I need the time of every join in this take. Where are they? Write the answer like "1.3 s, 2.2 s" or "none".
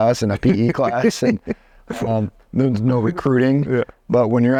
none